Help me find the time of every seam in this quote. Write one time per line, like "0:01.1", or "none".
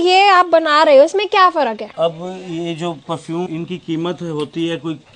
0:01.9
0:03.5

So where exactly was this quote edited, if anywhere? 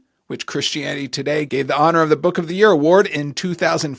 0:01.5

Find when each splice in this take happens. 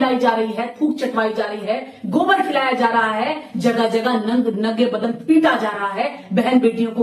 none

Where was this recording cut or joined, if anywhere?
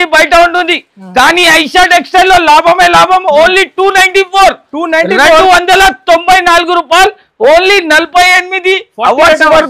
none

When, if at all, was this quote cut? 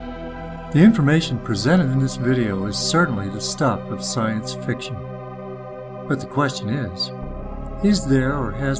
0:04.3

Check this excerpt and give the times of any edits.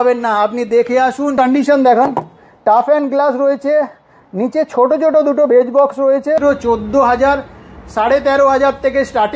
0:01.4
0:06.4

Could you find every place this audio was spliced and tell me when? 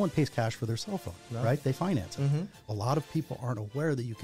0:02.7

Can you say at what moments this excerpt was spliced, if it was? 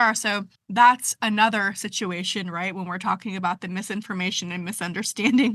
none

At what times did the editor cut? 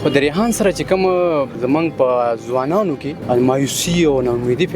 0:01.6
0:03.1

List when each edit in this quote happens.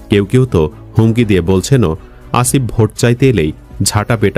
none

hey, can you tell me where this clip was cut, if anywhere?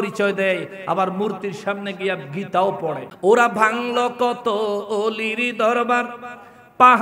0:03.1

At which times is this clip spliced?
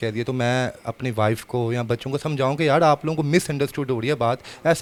none

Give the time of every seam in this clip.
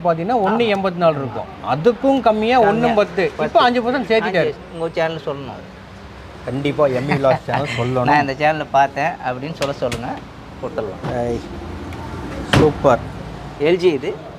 none

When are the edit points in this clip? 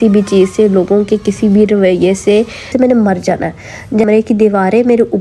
0:02.7
0:04.1

